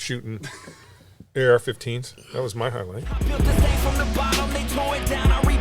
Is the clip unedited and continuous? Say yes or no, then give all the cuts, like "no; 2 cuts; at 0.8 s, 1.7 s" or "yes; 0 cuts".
no; 1 cut; at 3.2 s